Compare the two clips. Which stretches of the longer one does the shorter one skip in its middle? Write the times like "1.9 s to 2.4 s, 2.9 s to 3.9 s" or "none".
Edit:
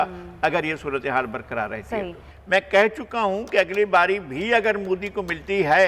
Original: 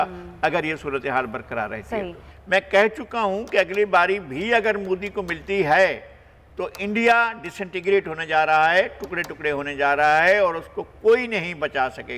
none